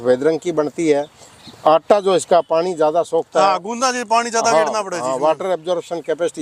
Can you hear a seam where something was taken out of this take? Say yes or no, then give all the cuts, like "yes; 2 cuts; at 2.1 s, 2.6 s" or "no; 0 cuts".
no; 0 cuts